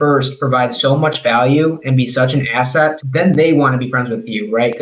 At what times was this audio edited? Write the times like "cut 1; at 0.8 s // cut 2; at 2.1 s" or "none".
none